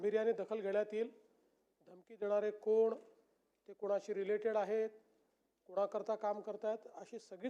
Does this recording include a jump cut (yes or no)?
no